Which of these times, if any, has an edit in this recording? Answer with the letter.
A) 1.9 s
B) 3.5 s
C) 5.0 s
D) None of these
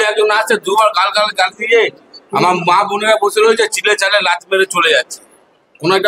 D